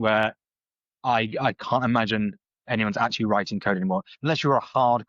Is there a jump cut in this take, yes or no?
no